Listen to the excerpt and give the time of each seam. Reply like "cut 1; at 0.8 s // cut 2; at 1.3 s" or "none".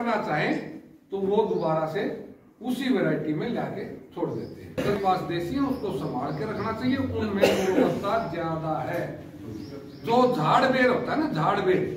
cut 1; at 4.8 s